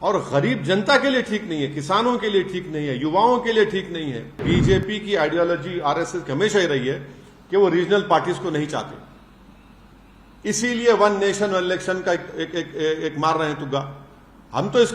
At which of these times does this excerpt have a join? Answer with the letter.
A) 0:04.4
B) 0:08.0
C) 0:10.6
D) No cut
A